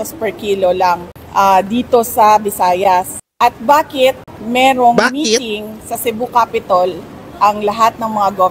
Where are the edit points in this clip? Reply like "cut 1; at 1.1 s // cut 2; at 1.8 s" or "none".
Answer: cut 1; at 1.1 s // cut 2; at 3.2 s // cut 3; at 4.3 s

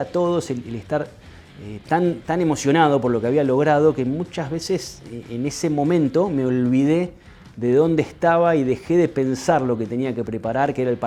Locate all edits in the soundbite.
none

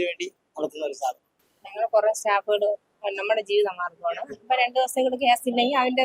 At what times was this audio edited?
cut 1; at 1.3 s

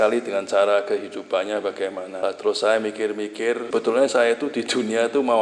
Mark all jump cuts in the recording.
cut 1; at 2.1 s // cut 2; at 3.6 s

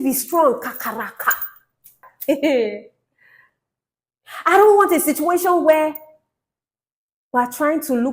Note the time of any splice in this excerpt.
cut 1; at 2.1 s

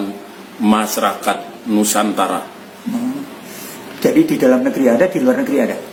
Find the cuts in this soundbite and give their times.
none

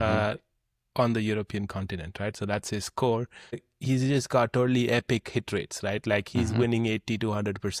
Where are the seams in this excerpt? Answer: cut 1; at 3.7 s

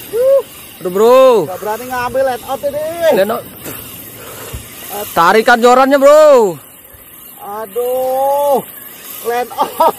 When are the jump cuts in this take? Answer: none

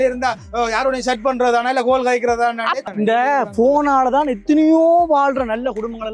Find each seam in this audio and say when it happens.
cut 1; at 2.8 s

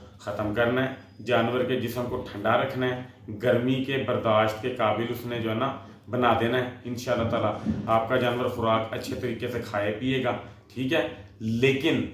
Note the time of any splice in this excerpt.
none

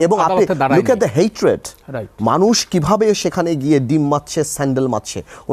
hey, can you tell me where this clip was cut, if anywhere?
none

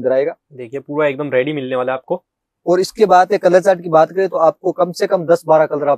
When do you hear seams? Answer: none

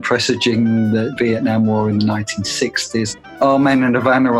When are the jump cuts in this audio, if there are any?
cut 1; at 1.1 s // cut 2; at 3.4 s

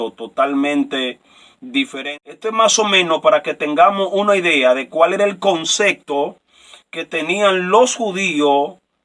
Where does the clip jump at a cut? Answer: cut 1; at 2.0 s

